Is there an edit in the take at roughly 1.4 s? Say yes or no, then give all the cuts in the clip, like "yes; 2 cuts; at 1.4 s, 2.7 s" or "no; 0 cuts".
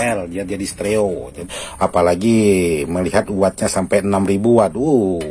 yes; 1 cut; at 1.4 s